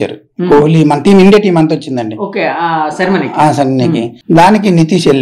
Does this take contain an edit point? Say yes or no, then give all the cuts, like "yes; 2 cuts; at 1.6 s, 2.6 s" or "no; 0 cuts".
yes; 1 cut; at 4.1 s